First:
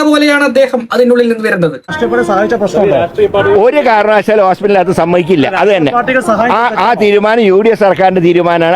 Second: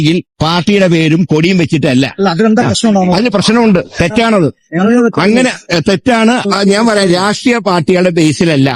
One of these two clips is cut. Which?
first; 1 cut; at 1.9 s

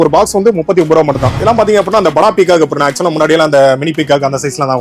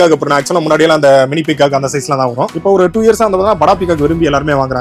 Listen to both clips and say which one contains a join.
first; 1 cut; at 1.3 s

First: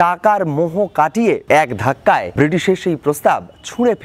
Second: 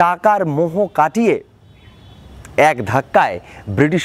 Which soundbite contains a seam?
first; 2 cuts; at 1.4 s, 2.3 s

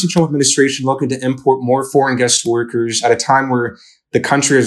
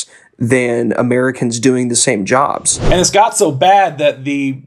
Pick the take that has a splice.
second; 1 cut; at 2.7 s

